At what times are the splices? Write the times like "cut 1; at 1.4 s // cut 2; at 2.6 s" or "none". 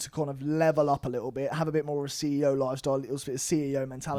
none